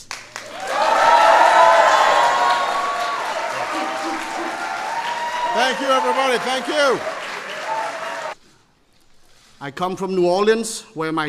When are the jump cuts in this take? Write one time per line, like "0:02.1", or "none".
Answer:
none